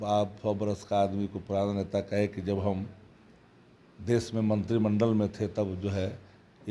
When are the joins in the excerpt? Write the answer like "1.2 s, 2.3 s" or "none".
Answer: none

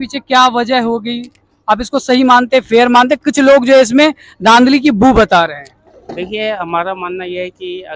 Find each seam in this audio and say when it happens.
none

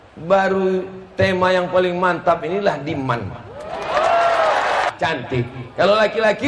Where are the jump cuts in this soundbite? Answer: 4.9 s

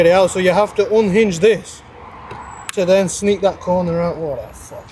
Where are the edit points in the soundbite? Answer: none

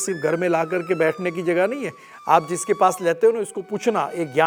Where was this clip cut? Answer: none

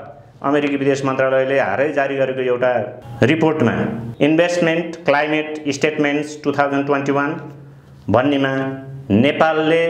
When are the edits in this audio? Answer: 3.0 s, 4.0 s

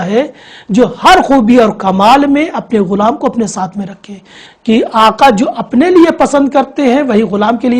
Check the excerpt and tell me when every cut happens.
4.4 s

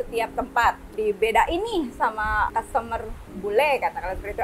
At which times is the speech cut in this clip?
0.9 s, 2.5 s

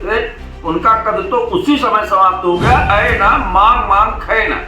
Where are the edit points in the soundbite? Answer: 2.9 s

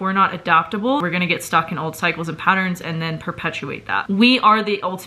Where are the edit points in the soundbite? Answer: 1.0 s, 4.0 s

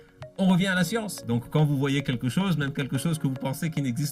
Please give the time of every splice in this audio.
1.1 s

